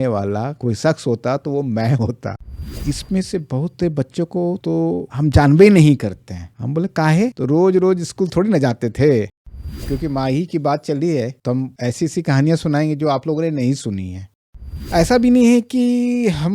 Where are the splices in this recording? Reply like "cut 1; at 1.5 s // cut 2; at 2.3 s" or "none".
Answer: cut 1; at 2.5 s // cut 2; at 9.3 s // cut 3; at 14.4 s